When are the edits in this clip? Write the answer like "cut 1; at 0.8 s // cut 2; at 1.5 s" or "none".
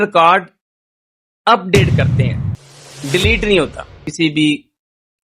cut 1; at 4.1 s